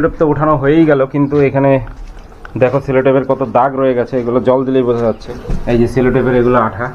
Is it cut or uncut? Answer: cut